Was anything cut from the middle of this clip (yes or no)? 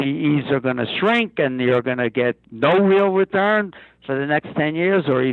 no